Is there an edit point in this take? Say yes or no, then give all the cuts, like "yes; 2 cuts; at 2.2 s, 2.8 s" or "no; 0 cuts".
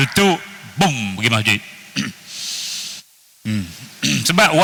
no; 0 cuts